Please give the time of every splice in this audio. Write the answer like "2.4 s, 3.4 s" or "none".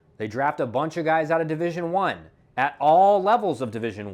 none

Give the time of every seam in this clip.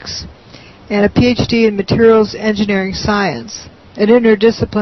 none

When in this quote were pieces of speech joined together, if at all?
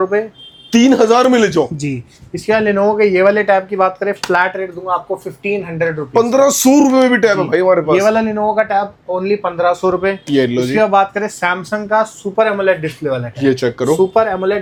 none

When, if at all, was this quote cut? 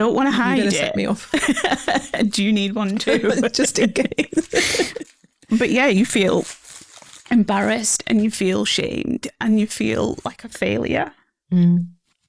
none

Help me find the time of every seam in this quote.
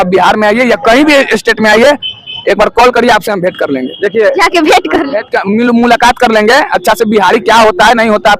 none

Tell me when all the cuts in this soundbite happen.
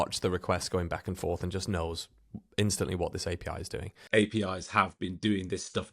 3.9 s

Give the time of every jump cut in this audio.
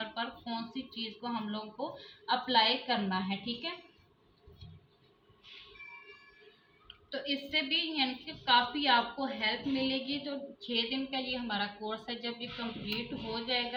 none

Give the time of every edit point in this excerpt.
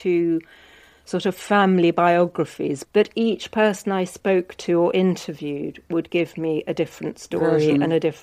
2.8 s

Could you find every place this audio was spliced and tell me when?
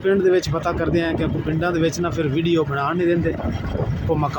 none

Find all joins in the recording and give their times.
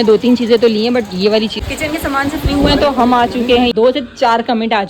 1.6 s, 3.7 s

